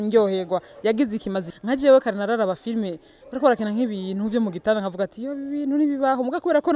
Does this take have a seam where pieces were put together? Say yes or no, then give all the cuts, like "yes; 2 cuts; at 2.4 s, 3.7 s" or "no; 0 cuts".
yes; 1 cut; at 1.5 s